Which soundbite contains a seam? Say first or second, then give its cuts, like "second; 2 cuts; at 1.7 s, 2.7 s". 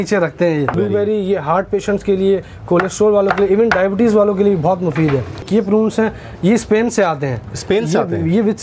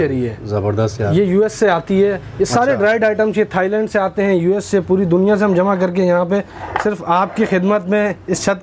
first; 2 cuts; at 0.7 s, 5.5 s